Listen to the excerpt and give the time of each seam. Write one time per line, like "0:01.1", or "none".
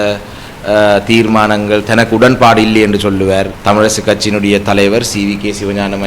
0:03.5